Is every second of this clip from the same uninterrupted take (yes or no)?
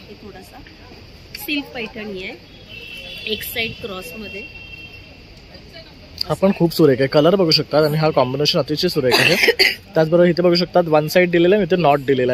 yes